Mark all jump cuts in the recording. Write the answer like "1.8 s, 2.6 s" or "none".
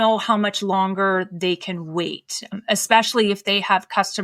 2.5 s